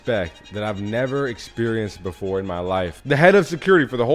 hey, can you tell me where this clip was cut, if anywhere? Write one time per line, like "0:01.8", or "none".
0:03.0

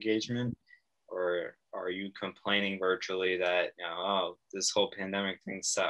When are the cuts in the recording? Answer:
0:03.8

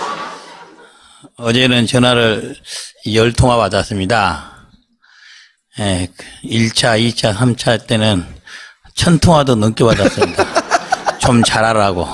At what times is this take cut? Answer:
0:01.4

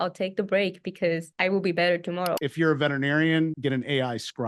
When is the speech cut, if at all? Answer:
0:01.3
0:02.4
0:03.6

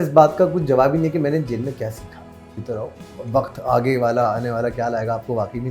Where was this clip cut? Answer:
0:02.5

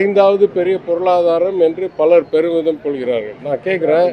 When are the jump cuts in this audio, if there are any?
none

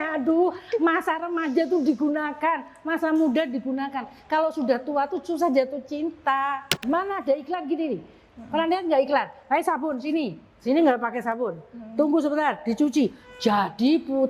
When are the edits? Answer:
0:06.8

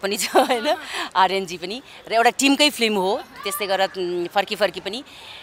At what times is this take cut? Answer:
none

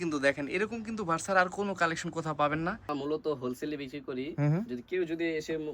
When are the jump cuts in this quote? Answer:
0:02.9

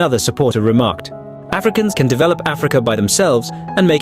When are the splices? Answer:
none

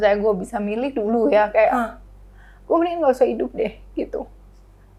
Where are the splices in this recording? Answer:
none

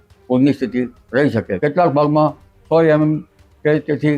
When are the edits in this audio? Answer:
0:01.5

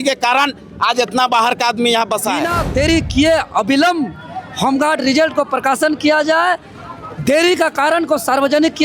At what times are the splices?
0:02.6

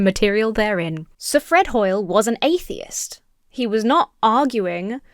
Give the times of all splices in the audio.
0:01.1

